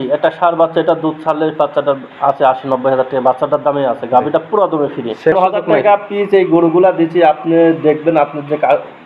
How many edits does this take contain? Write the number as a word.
one